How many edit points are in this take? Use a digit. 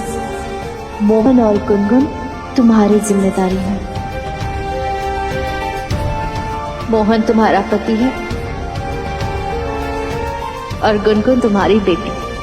1